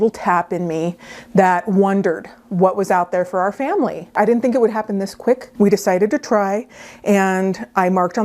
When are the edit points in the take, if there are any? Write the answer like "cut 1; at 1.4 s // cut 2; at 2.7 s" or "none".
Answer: cut 1; at 4.1 s // cut 2; at 5.5 s